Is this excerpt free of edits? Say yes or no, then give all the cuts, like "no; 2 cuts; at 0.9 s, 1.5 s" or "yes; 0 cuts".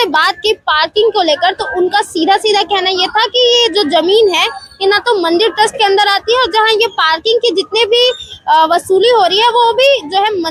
yes; 0 cuts